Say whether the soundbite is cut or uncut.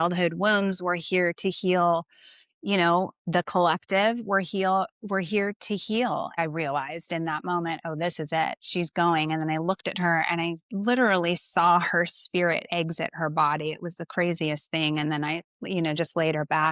cut